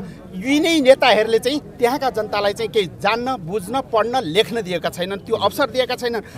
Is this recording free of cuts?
yes; 0 cuts

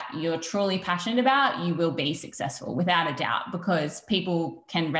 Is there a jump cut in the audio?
no; 0 cuts

